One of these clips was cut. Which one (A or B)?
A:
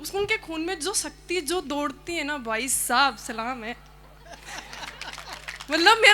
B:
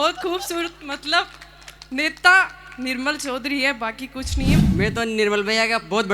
B